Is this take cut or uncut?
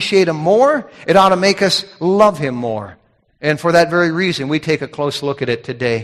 uncut